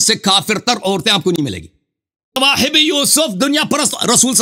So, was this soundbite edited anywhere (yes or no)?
yes